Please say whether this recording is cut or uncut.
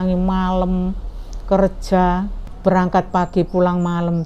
cut